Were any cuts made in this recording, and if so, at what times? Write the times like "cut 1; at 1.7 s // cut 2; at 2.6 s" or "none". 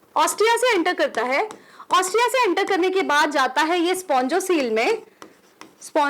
none

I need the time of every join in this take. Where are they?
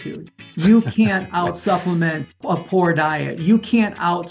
cut 1; at 2.4 s

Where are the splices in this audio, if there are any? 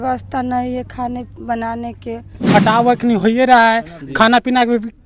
cut 1; at 2.5 s

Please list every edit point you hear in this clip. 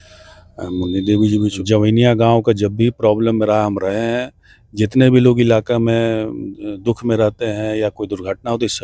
cut 1; at 1.6 s

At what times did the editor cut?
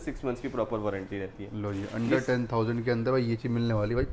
none

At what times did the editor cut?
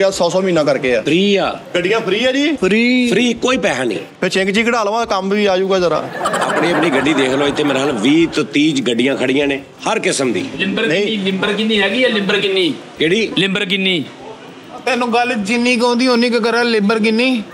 cut 1; at 1.0 s // cut 2; at 1.6 s // cut 3; at 2.6 s // cut 4; at 9.7 s

